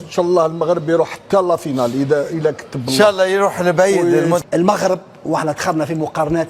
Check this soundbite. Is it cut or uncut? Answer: cut